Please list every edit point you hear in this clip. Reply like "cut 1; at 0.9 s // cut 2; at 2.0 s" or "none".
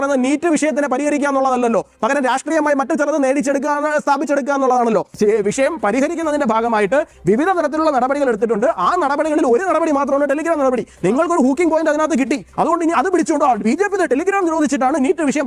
cut 1; at 5.2 s